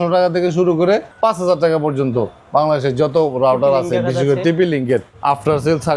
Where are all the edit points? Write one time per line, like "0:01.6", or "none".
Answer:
0:01.1
0:05.1